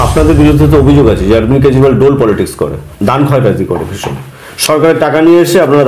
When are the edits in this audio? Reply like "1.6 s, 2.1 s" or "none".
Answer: none